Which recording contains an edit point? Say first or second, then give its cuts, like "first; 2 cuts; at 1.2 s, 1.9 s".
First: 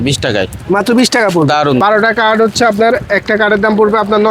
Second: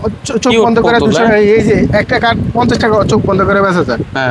first; 1 cut; at 1.8 s